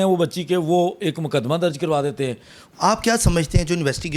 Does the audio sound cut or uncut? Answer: cut